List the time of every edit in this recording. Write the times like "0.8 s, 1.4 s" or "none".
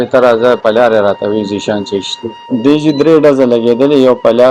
2.5 s